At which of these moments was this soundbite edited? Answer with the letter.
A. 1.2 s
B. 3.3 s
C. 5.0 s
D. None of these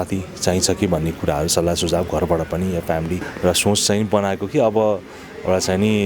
B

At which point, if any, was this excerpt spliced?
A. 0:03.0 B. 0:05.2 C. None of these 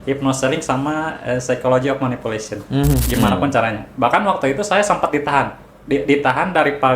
A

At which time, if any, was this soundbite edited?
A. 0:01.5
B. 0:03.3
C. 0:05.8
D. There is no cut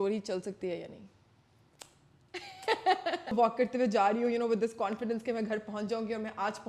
B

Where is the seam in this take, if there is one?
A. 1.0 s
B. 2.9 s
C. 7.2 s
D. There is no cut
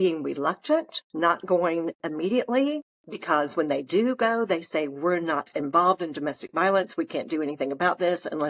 A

